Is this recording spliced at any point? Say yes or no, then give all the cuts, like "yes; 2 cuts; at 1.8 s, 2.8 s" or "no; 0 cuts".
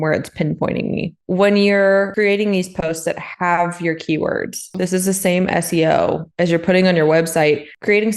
yes; 3 cuts; at 1.2 s, 2.1 s, 4.7 s